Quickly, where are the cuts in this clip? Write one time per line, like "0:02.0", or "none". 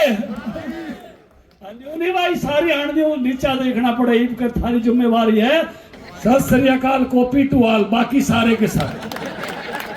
0:05.8